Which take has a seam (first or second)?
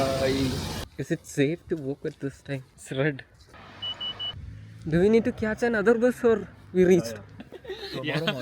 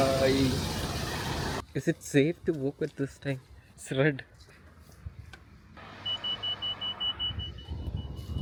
first